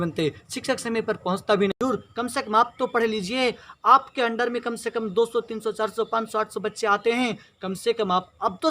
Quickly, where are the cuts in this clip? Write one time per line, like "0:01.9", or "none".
0:01.7